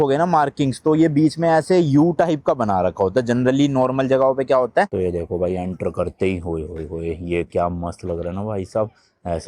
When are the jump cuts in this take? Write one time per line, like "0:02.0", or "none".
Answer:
0:04.9

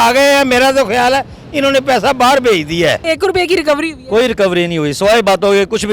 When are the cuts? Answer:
0:03.0

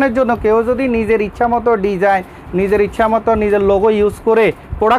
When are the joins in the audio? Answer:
none

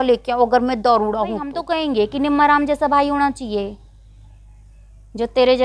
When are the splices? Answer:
0:01.6

